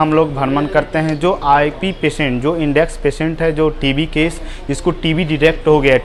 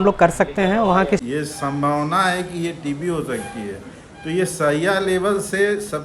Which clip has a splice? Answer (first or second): second